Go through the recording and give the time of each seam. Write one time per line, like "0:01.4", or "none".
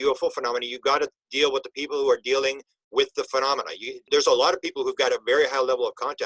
0:04.0